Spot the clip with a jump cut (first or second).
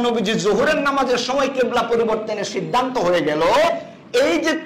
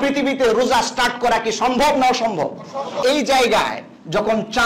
second